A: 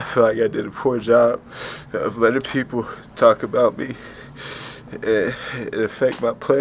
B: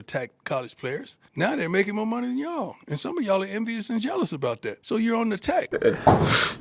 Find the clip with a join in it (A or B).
B